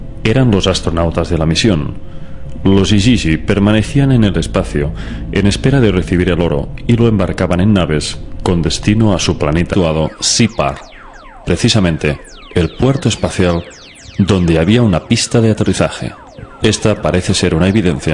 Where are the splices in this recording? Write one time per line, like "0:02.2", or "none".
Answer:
none